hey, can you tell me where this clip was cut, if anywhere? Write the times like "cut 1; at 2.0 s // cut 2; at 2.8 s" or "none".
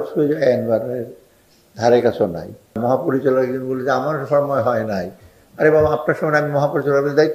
cut 1; at 2.8 s